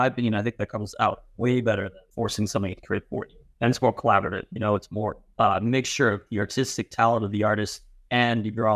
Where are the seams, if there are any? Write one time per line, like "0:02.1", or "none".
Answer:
0:02.0
0:03.4
0:05.2